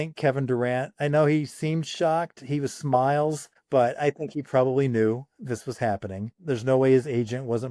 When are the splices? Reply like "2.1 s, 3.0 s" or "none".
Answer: 3.5 s, 6.3 s

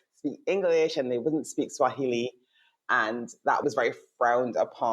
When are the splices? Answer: 3.6 s

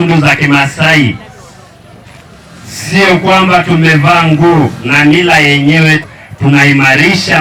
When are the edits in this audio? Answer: 6.0 s

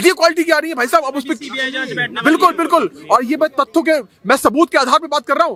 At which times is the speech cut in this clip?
none

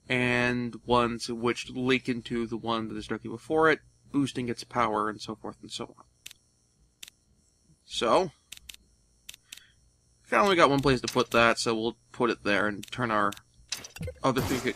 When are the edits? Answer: 2.4 s

